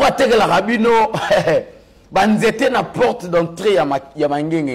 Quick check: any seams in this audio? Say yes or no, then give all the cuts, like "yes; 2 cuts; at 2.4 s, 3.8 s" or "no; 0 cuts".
no; 0 cuts